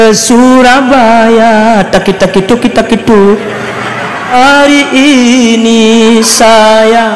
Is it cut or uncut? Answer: cut